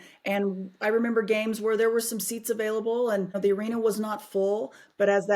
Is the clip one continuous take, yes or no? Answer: no